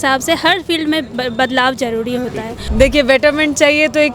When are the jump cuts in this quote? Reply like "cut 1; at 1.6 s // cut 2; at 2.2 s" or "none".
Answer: cut 1; at 2.6 s